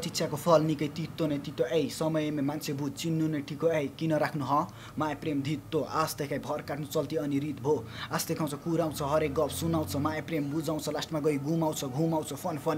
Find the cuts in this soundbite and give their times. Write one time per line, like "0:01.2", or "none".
none